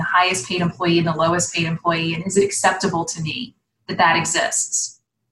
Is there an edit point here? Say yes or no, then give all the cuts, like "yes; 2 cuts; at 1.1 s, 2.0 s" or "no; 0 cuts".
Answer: no; 0 cuts